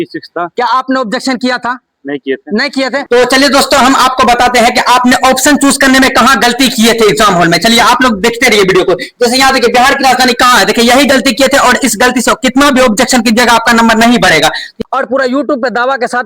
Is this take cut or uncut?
cut